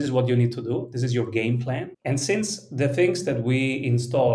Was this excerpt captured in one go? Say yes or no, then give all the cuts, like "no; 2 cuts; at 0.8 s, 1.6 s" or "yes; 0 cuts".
no; 1 cut; at 1.9 s